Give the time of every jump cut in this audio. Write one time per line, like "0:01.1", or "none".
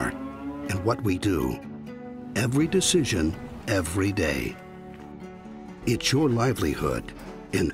none